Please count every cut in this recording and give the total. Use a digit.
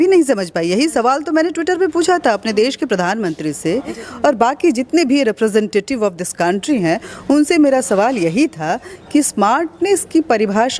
1